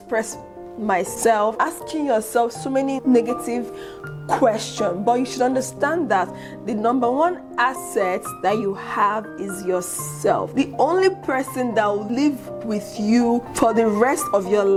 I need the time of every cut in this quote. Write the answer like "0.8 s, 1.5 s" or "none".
none